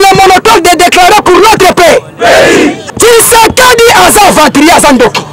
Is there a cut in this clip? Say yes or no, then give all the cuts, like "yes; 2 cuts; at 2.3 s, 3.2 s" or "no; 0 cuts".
yes; 1 cut; at 2.8 s